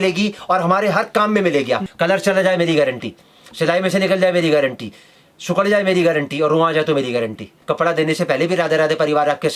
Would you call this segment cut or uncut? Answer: cut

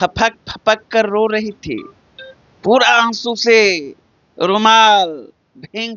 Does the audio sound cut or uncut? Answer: uncut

